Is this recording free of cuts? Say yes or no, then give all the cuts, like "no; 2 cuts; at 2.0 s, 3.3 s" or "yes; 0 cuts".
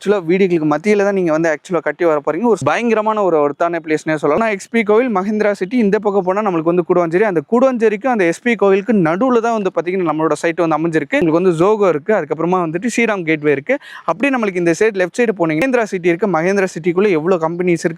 no; 4 cuts; at 2.6 s, 4.4 s, 11.2 s, 15.6 s